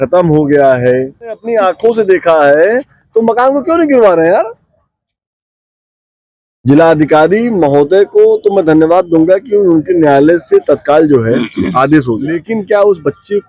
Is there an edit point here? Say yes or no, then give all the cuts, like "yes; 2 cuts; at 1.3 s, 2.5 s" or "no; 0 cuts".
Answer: yes; 2 cuts; at 1.4 s, 12.5 s